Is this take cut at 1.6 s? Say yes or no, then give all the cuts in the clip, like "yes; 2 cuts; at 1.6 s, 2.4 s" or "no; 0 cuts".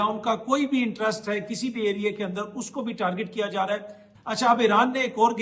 no; 1 cut; at 4.0 s